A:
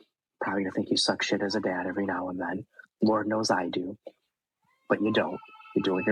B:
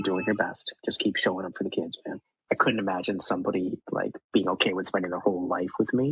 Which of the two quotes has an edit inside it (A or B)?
B